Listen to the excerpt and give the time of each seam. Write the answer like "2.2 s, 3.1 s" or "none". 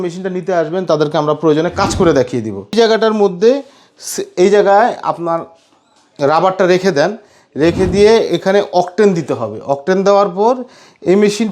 2.7 s